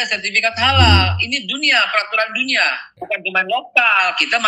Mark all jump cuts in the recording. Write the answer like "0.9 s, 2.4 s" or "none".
2.9 s